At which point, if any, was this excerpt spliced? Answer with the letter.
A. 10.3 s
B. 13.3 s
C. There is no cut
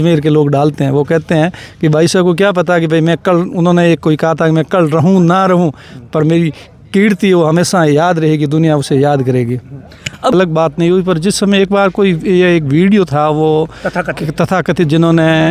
A